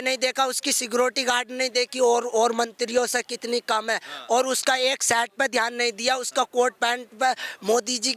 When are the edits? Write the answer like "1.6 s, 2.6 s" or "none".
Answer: none

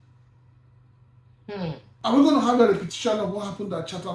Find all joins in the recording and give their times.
1.9 s

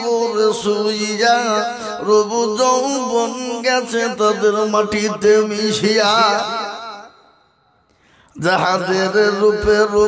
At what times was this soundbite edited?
none

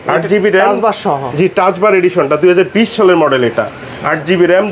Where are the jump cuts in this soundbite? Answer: none

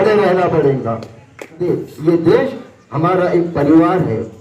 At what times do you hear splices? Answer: 1.6 s

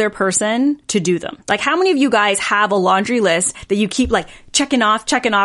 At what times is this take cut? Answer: 1.1 s

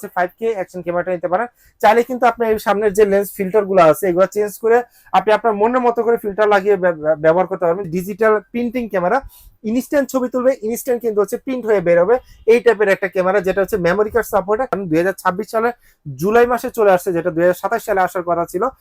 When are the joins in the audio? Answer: 7.8 s, 14.8 s

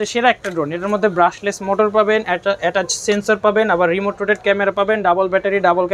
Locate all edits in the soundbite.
none

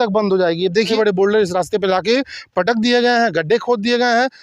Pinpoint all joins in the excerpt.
0.9 s

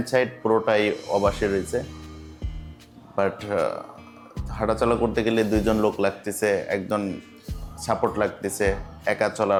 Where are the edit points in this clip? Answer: none

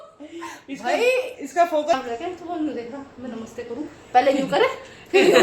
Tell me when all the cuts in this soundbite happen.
1.9 s

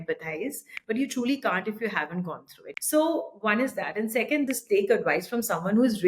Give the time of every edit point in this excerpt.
2.5 s, 4.5 s

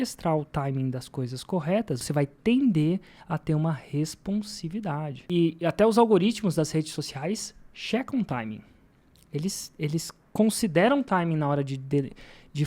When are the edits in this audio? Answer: 2.0 s, 5.1 s

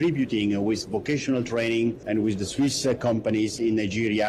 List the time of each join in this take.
none

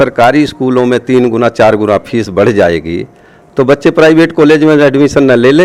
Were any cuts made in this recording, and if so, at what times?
none

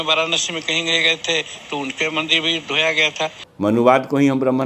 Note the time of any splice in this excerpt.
3.4 s

